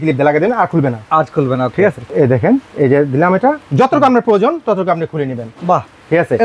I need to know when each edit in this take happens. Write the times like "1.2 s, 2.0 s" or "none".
none